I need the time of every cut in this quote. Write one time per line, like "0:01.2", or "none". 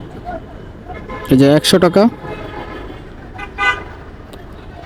none